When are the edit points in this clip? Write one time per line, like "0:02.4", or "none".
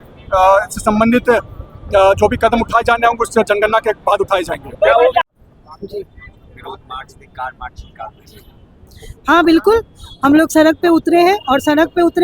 0:05.2